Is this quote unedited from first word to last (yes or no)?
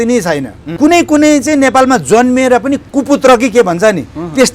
no